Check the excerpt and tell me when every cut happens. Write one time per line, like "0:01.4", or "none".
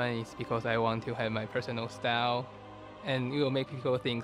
0:02.6

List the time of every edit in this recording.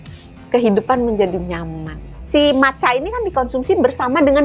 0:02.1

